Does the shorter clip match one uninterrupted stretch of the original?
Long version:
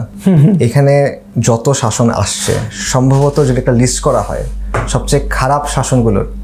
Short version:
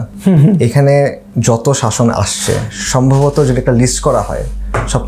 yes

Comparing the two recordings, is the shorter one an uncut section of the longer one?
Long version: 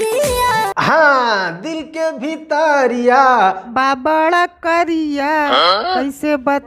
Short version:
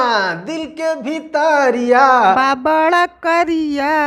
no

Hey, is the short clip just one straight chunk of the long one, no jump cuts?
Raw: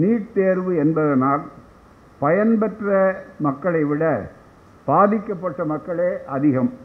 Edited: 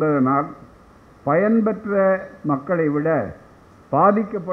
yes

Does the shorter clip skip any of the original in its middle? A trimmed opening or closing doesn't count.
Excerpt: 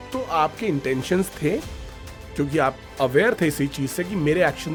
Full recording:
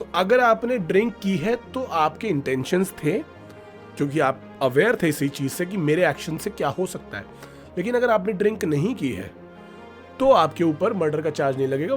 no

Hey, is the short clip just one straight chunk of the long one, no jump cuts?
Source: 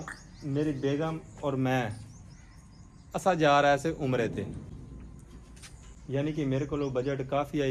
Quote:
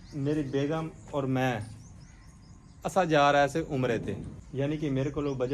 no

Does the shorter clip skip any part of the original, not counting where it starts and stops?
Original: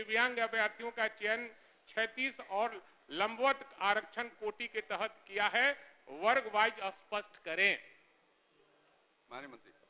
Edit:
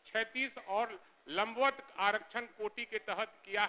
no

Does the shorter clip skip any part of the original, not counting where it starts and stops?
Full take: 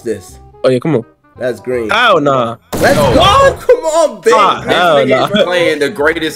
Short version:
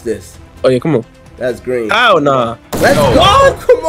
no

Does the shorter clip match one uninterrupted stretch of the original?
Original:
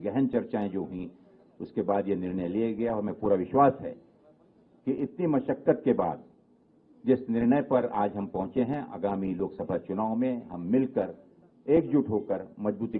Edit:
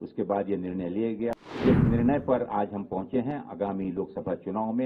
no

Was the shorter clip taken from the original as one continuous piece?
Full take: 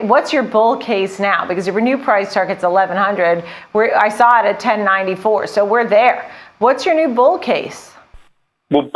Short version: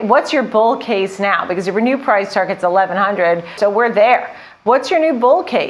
no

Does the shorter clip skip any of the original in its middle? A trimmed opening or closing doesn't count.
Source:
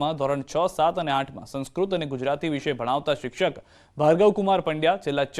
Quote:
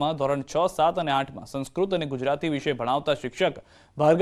no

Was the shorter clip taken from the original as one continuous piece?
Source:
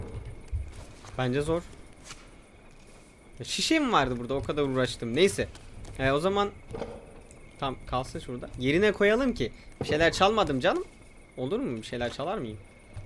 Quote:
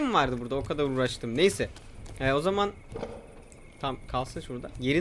yes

